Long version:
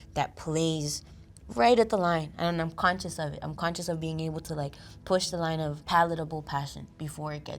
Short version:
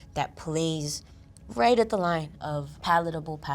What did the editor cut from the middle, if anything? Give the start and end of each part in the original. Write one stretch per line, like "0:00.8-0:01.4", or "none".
0:02.4-0:05.4